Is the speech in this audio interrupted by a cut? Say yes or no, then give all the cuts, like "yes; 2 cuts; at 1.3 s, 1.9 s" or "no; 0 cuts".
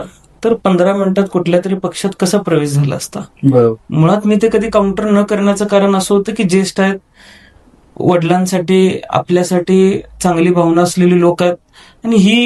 no; 0 cuts